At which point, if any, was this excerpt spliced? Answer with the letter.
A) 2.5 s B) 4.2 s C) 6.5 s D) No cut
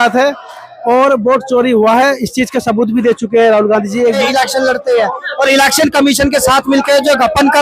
B